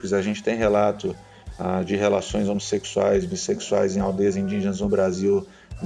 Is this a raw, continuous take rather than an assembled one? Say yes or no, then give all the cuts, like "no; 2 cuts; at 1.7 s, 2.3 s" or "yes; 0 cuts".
yes; 0 cuts